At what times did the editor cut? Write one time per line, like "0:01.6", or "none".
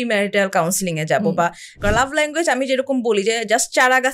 0:01.7